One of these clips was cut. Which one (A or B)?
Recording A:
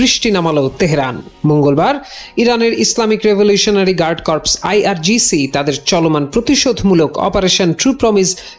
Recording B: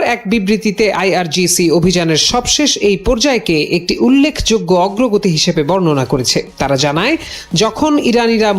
B